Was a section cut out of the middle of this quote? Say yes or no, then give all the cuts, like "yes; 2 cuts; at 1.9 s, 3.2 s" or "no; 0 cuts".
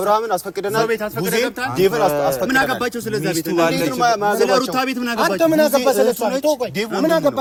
no; 0 cuts